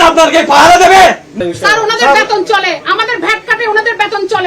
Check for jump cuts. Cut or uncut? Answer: cut